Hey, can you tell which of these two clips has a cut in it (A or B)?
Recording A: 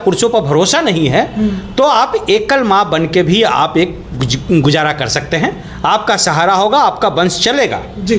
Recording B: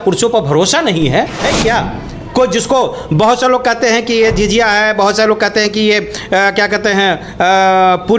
B